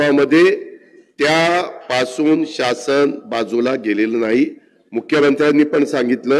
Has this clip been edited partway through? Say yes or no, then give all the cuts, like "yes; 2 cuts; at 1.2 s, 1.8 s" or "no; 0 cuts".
no; 0 cuts